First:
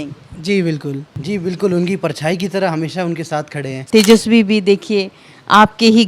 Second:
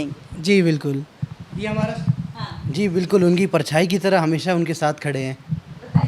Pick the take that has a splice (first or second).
first